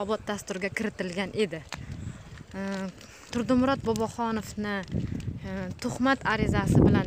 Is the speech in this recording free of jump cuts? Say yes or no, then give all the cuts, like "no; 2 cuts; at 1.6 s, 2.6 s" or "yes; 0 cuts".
yes; 0 cuts